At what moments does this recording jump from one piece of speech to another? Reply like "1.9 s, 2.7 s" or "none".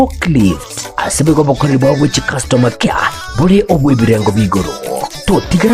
2.8 s